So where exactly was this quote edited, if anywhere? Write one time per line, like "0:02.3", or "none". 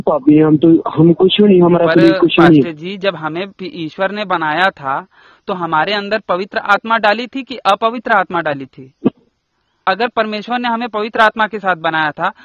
0:09.8